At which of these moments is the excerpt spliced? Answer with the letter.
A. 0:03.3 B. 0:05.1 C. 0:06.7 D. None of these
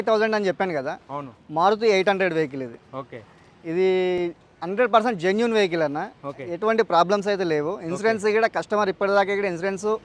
D